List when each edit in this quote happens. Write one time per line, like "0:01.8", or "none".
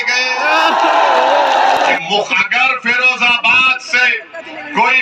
0:02.0